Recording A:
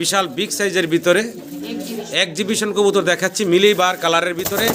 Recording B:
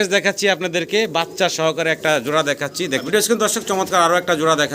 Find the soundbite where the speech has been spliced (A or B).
B